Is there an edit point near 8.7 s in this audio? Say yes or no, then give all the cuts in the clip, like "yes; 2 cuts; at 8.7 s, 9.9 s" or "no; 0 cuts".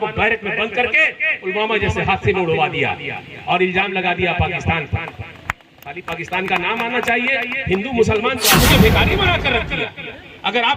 yes; 1 cut; at 8.7 s